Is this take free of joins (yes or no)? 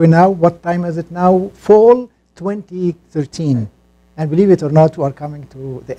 yes